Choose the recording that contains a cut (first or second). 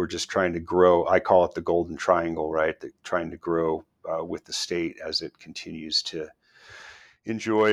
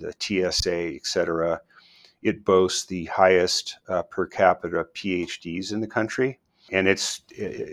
second